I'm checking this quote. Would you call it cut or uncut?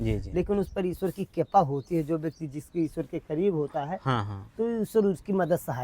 uncut